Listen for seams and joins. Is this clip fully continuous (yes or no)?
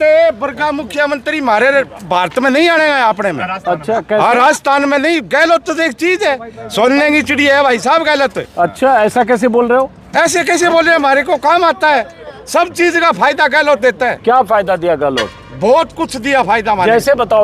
yes